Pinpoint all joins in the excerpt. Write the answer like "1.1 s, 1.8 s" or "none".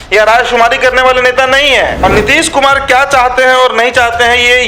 2.0 s